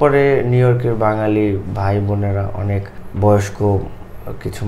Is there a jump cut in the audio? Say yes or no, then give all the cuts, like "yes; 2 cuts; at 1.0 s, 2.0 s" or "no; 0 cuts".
yes; 1 cut; at 3.0 s